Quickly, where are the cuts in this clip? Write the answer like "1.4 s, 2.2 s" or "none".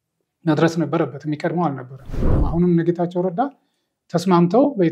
2.4 s